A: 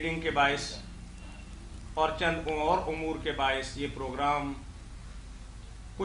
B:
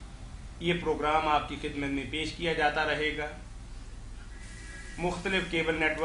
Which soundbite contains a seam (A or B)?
A